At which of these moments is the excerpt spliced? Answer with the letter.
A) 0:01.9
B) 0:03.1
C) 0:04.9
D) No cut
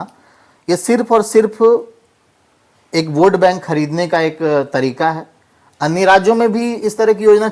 D